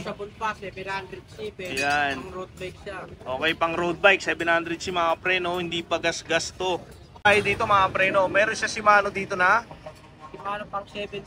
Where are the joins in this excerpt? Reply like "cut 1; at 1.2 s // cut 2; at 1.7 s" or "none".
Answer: cut 1; at 7.3 s